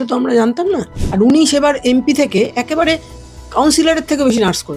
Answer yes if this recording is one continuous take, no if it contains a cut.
no